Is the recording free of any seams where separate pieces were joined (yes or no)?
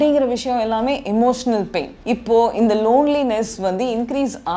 no